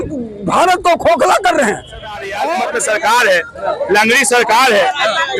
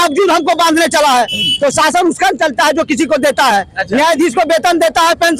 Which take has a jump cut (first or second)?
first